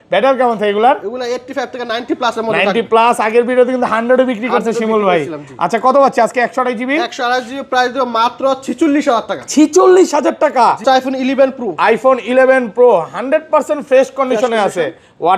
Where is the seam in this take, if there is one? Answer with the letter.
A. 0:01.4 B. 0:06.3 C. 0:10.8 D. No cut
C